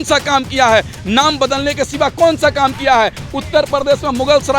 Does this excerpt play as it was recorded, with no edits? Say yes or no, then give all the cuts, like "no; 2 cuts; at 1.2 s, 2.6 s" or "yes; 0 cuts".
yes; 0 cuts